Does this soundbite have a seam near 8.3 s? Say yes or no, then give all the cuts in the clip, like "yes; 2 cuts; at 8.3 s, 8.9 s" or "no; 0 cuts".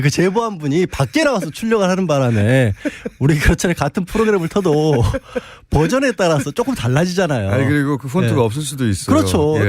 yes; 1 cut; at 8.3 s